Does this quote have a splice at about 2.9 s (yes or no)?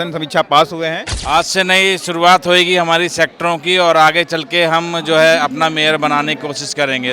no